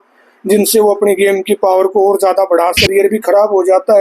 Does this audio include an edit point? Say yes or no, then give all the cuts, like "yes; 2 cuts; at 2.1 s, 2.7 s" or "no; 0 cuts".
yes; 1 cut; at 2.8 s